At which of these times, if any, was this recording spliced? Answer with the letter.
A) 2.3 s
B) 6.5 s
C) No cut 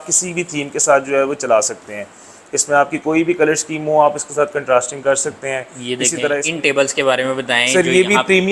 B